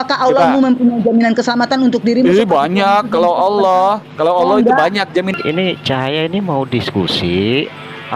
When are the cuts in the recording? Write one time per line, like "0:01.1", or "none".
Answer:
0:05.3